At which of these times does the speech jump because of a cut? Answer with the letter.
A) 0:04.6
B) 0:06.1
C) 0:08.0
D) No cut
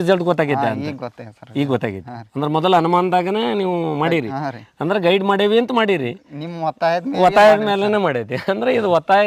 D